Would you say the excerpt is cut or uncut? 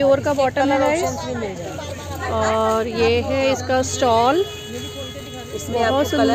uncut